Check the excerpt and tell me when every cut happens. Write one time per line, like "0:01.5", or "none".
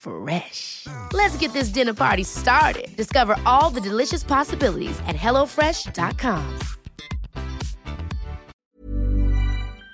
0:08.5